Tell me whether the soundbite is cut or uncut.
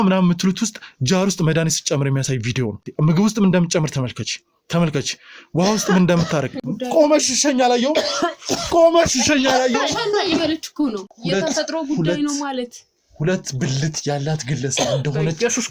cut